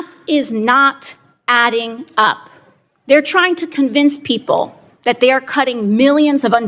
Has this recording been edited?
no; 0 cuts

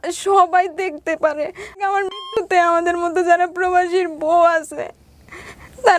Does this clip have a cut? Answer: yes; 1 cut; at 1.8 s

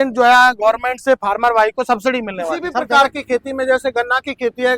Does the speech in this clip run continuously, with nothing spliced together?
no; 1 cut; at 2.9 s

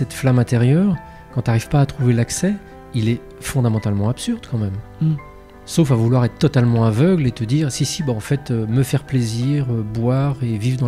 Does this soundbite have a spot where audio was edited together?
no; 0 cuts

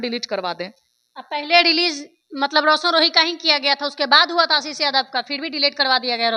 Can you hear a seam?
no; 0 cuts

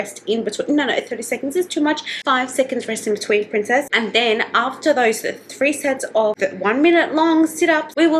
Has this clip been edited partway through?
no; 0 cuts

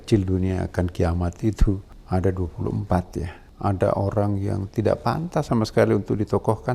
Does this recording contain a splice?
yes; 2 cuts; at 1.9 s, 3.4 s

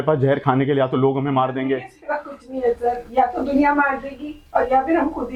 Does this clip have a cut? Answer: no; 0 cuts

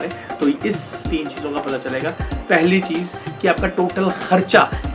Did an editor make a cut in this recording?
yes; 1 cut; at 1.0 s

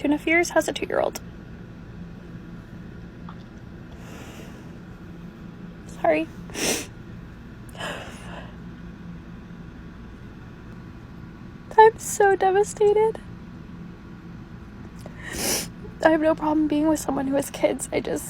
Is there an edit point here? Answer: yes; 1 cut; at 10.7 s

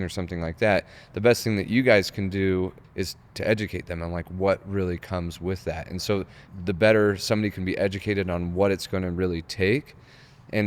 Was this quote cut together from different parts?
yes; 2 cuts; at 2.8 s, 6.4 s

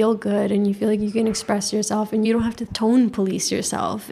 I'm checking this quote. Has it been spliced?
yes; 1 cut; at 2.3 s

